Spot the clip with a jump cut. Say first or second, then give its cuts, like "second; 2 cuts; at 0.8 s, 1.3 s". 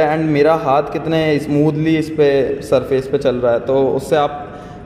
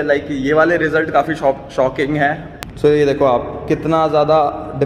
second; 1 cut; at 2.5 s